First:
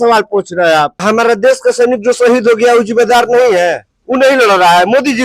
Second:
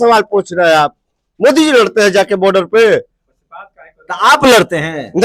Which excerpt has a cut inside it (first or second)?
first